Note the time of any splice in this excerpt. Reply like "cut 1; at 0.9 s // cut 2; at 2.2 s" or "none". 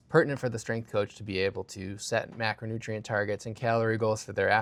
none